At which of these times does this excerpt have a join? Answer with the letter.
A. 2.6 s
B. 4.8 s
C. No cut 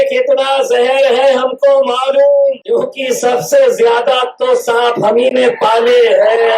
A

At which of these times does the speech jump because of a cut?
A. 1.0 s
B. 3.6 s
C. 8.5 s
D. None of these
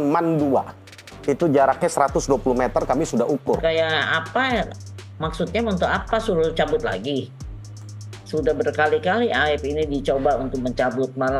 B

